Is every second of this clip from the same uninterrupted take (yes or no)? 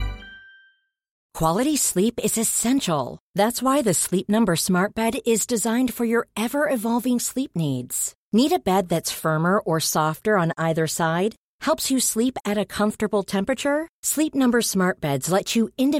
no